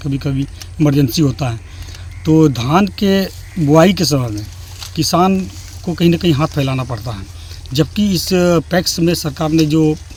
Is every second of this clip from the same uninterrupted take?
yes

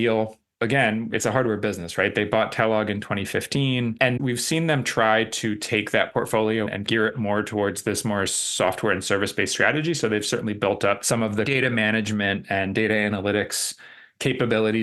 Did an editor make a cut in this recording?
yes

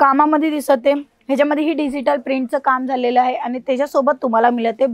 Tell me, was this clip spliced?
no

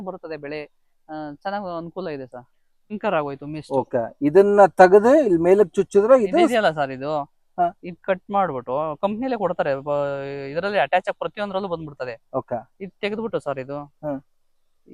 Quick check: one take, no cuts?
no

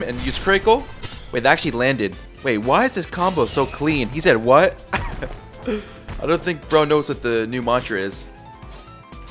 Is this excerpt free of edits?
yes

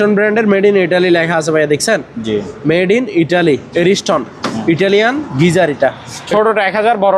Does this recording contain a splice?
yes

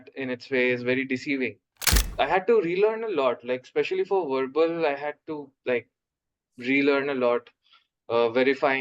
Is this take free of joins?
no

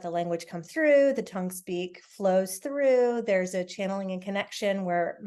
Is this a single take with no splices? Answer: yes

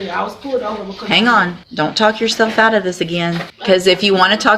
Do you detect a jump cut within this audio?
yes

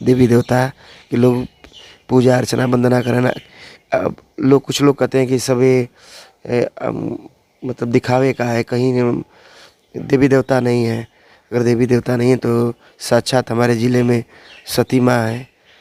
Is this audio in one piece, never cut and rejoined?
yes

